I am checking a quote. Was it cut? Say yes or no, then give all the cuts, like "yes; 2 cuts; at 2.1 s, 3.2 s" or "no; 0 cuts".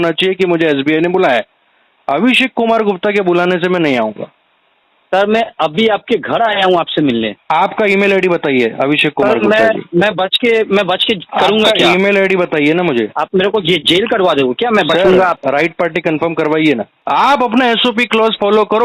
yes; 3 cuts; at 7.4 s, 15.4 s, 16.9 s